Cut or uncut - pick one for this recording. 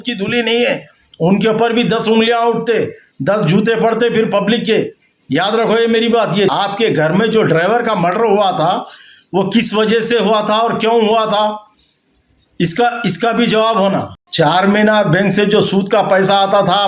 cut